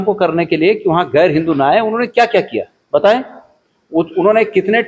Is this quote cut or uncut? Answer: uncut